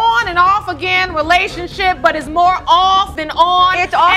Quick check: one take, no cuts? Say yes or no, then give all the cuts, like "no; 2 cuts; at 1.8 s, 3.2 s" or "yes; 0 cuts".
yes; 0 cuts